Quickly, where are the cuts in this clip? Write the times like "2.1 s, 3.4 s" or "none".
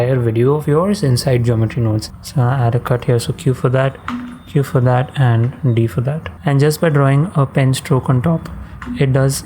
2.2 s, 6.3 s